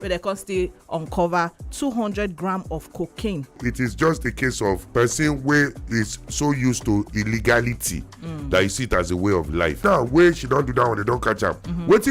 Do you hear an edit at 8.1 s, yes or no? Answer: no